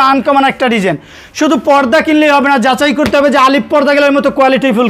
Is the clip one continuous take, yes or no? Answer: yes